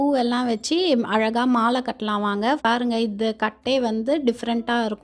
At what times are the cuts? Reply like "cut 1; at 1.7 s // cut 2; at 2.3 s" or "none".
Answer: cut 1; at 2.6 s